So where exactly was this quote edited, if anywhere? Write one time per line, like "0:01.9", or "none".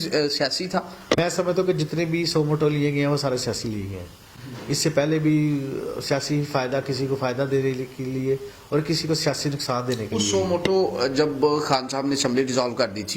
0:01.1